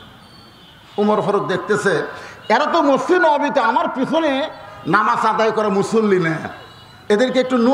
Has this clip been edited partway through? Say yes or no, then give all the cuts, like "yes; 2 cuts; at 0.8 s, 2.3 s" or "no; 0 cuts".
no; 0 cuts